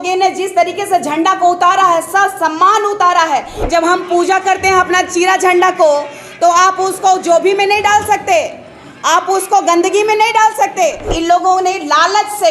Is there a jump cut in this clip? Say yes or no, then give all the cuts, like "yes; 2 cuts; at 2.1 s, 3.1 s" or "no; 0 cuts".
yes; 2 cuts; at 3.6 s, 11.1 s